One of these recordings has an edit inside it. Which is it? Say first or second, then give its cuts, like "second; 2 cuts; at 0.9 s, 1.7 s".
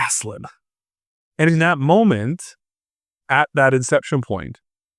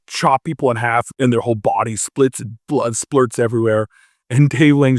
second; 1 cut; at 1.1 s